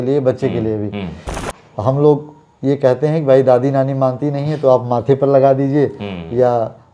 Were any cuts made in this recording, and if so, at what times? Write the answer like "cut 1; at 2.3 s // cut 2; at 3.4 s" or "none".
cut 1; at 1.3 s